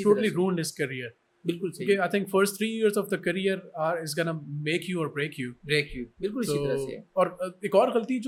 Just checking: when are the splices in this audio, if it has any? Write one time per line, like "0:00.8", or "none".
none